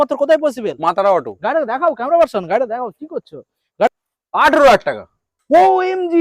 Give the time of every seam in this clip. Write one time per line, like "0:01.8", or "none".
0:03.9